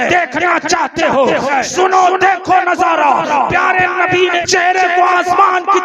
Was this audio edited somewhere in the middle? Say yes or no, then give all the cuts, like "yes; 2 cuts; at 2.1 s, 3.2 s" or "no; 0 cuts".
yes; 2 cuts; at 1.5 s, 4.4 s